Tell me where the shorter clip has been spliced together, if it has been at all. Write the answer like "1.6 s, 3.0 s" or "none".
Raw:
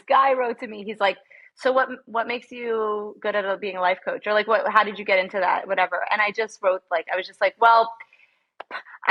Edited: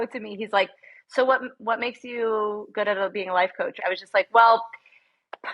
3.8 s